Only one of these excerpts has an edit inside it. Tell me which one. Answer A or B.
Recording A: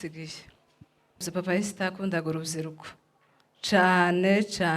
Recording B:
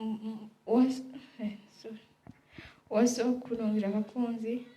A